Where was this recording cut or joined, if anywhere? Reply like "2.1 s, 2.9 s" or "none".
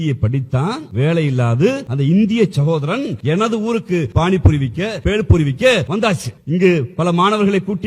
0.9 s, 1.9 s, 3.2 s, 4.1 s, 5.0 s, 6.0 s